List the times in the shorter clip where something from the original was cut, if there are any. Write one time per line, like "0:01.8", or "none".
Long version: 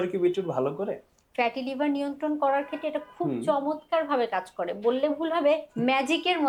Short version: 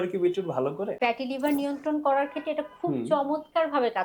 0:00.9